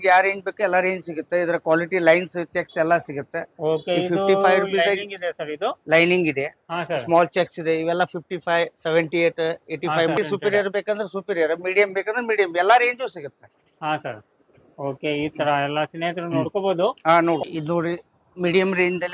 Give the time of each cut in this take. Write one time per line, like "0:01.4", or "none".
0:10.2
0:17.4